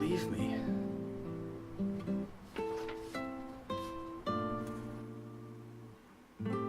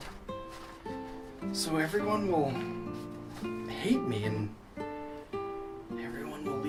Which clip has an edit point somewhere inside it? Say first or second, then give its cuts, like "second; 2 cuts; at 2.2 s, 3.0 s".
first; 1 cut; at 1.8 s